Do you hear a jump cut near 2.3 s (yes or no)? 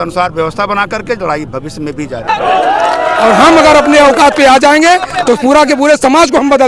yes